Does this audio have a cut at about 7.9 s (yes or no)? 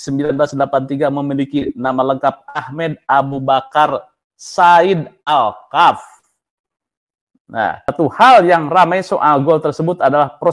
yes